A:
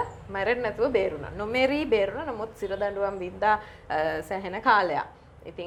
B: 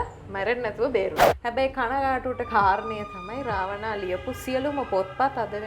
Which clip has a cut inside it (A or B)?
B